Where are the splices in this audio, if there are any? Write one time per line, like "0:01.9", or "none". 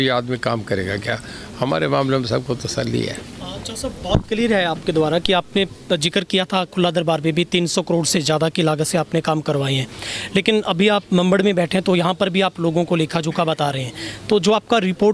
none